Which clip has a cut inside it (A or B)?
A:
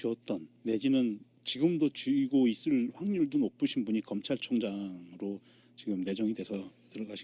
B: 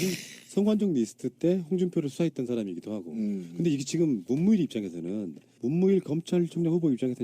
A